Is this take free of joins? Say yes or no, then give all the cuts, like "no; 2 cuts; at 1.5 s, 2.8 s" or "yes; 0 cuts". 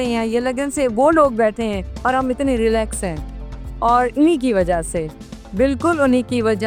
yes; 0 cuts